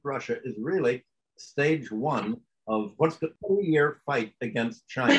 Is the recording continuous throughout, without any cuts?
yes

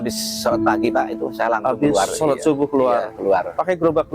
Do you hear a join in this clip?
no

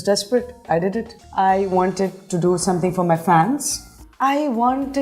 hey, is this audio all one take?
no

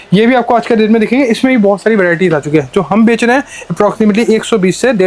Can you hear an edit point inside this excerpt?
no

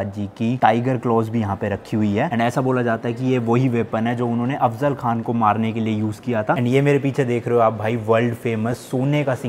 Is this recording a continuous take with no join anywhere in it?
no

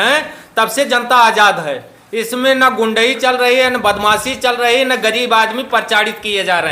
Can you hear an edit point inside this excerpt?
no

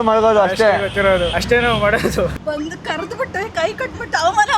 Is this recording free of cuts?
no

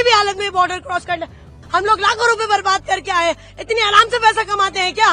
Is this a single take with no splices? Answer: no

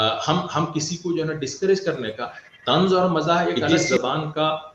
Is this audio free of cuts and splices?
no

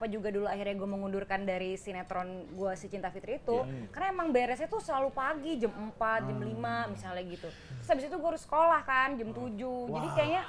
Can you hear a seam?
no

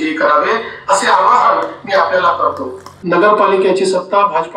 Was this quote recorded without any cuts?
no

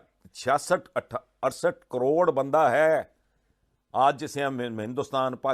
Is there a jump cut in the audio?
no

